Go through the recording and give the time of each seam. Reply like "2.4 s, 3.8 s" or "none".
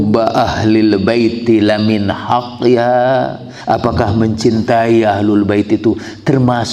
3.5 s